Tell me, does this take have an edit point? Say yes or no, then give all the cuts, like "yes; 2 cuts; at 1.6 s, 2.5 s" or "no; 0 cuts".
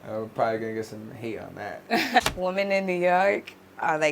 yes; 1 cut; at 2.2 s